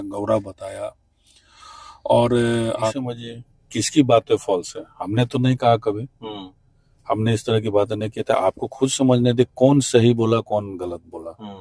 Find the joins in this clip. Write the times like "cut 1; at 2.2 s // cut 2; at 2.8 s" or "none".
cut 1; at 3.0 s